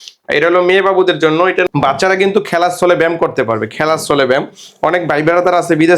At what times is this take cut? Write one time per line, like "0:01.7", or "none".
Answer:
0:01.7